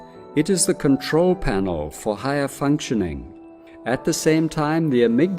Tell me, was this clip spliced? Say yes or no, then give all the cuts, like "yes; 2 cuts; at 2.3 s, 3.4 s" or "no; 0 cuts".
yes; 1 cut; at 3.3 s